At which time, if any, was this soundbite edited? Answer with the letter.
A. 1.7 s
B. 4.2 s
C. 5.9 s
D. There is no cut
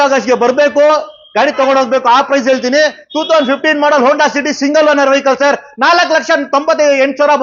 D